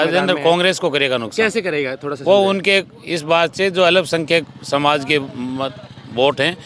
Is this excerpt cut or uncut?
uncut